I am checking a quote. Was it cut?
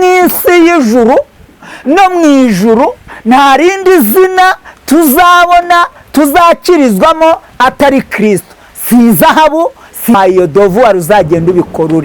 yes; 1 cut; at 10.1 s

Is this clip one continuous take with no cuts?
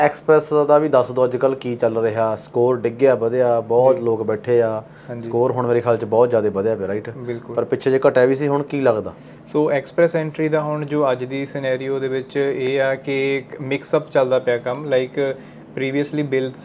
yes; 0 cuts

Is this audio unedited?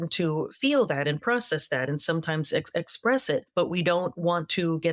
no; 1 cut; at 3.5 s

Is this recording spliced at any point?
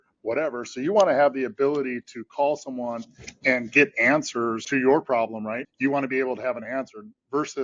yes; 2 cuts; at 4.7 s, 5.7 s

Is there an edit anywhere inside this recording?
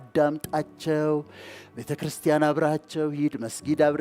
no; 0 cuts

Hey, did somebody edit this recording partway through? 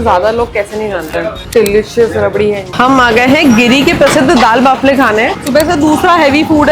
yes; 3 cuts; at 1.4 s, 2.7 s, 5.4 s

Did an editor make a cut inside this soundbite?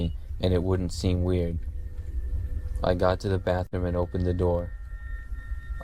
no; 0 cuts

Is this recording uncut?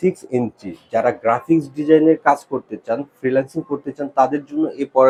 yes; 0 cuts

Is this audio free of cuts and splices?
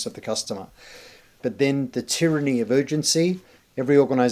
no; 1 cut; at 1.4 s

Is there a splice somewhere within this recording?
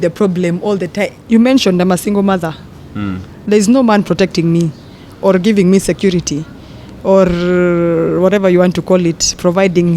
yes; 1 cut; at 1.2 s

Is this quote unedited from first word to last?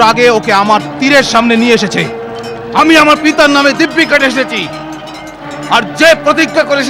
yes; 0 cuts

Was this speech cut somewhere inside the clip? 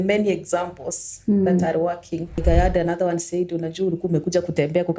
yes; 1 cut; at 2.4 s

